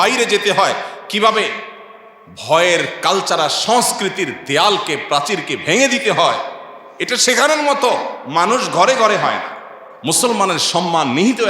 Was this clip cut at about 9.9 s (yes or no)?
yes